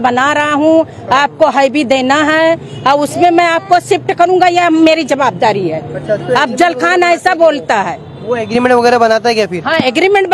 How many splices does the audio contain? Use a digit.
0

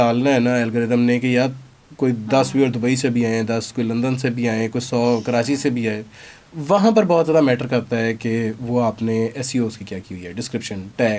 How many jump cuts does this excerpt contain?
0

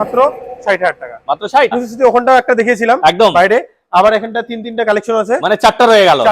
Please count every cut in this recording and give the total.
1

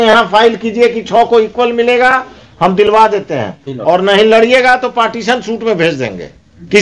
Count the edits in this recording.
0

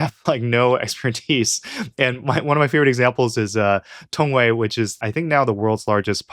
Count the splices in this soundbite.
1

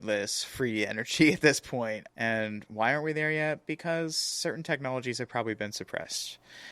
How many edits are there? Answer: 1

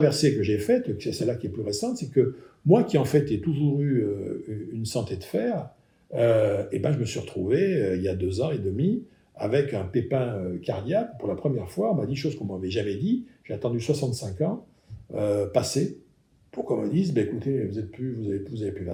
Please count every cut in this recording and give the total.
0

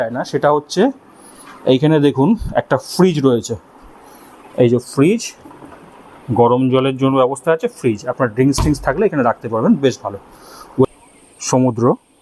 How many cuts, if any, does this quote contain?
1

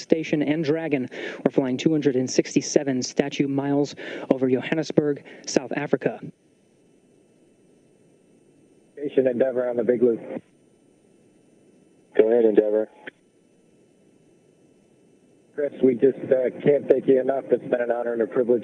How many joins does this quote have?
4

